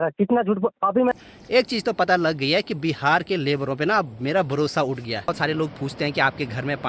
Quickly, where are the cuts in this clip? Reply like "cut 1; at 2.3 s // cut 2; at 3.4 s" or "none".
cut 1; at 1.1 s // cut 2; at 5.3 s